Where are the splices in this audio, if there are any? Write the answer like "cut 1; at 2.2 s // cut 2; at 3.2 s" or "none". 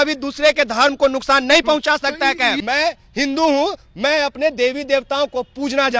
cut 1; at 2.6 s